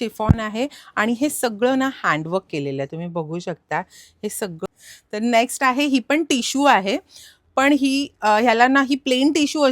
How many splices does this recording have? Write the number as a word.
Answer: one